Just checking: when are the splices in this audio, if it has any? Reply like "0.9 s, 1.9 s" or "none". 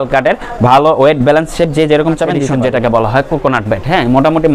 2.4 s

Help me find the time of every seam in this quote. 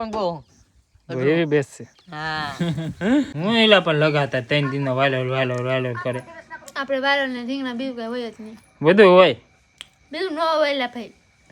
3.3 s

